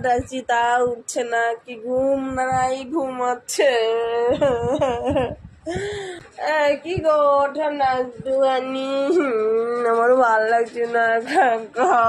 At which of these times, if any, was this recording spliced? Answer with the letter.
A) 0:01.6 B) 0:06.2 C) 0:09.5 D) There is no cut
B